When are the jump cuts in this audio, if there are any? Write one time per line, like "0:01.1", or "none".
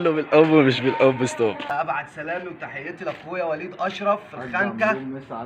0:01.7